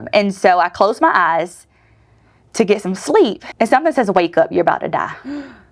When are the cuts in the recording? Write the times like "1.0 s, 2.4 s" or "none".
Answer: 3.4 s